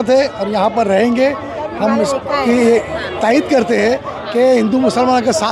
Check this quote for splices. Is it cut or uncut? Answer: uncut